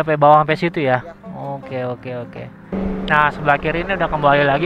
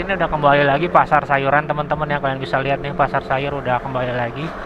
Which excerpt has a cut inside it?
first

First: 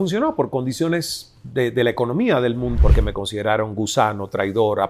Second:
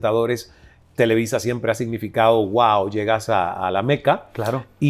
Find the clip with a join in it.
first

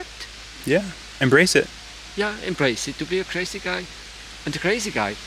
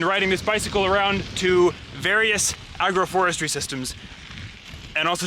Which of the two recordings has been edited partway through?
second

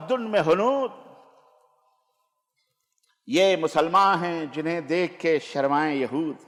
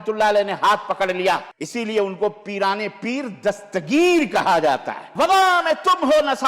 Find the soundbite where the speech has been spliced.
second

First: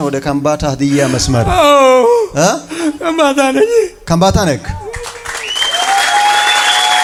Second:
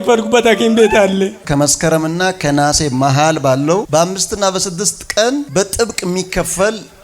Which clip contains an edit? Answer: second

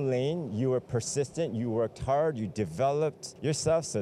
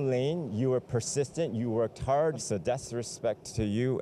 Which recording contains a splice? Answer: second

